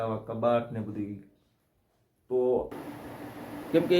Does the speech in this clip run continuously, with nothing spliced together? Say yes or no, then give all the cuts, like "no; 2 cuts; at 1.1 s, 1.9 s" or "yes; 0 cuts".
no; 1 cut; at 2.7 s